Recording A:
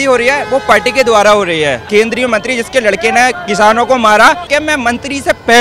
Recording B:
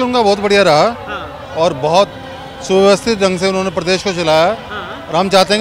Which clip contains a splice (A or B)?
A